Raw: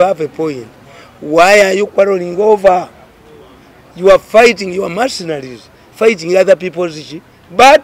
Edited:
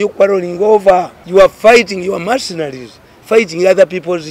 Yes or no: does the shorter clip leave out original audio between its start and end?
yes